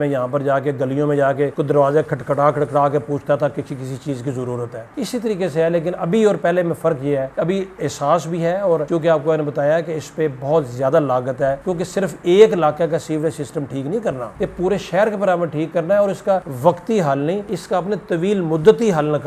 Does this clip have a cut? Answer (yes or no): no